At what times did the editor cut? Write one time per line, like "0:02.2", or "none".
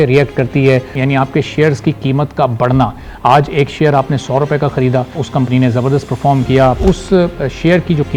0:01.0
0:05.2
0:06.8